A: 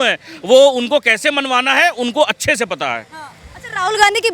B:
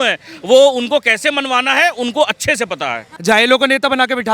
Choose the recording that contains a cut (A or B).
B